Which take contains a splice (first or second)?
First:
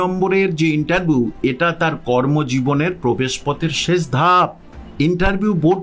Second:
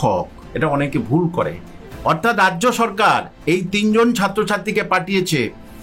first